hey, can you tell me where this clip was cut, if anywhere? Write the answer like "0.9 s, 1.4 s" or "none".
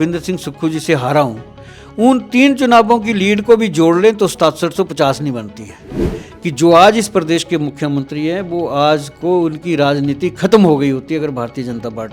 5.9 s